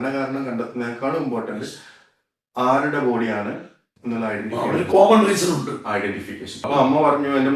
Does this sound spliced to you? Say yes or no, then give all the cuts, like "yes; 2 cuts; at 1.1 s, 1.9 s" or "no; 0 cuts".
yes; 1 cut; at 6.6 s